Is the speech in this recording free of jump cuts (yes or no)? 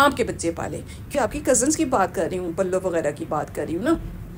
no